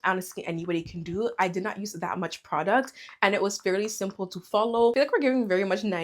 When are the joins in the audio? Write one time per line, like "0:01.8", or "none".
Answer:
0:04.9